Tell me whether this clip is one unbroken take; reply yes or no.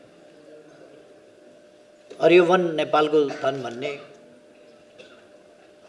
yes